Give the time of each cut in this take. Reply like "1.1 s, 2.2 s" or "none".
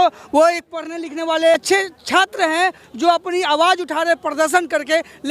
1.5 s